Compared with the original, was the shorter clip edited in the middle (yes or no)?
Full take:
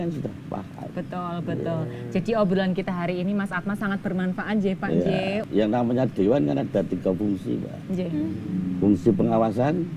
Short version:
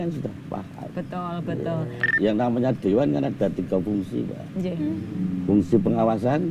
yes